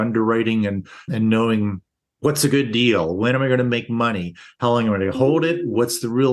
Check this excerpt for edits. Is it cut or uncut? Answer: uncut